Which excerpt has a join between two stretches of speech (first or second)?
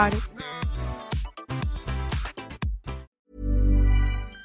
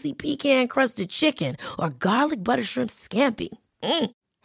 first